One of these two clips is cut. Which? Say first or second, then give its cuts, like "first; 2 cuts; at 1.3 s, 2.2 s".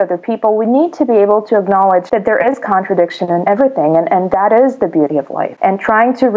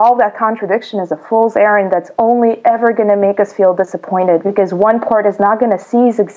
first; 3 cuts; at 2.1 s, 3.5 s, 5.4 s